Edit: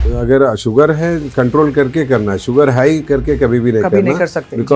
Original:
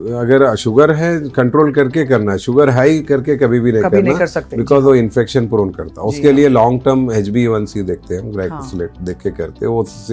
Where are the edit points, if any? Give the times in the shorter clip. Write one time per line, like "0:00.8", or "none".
none